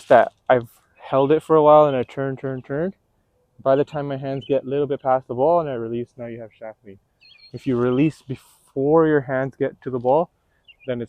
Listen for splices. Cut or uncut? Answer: uncut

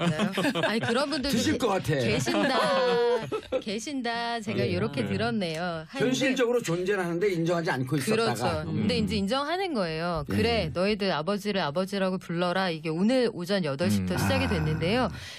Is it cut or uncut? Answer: uncut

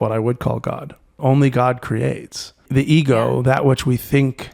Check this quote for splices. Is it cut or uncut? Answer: cut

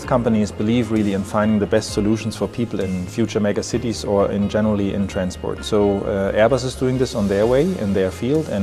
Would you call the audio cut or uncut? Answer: cut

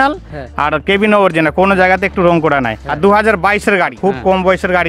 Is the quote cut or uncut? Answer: cut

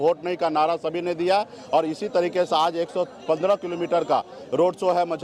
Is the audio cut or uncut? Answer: uncut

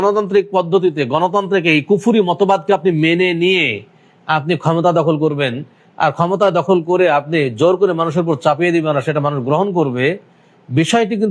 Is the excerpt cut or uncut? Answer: uncut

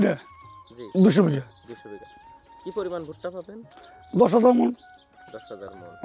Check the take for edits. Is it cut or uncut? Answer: uncut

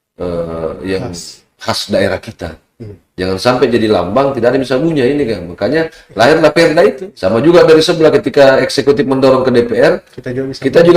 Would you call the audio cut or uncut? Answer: cut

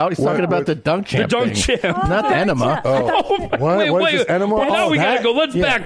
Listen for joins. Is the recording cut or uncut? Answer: cut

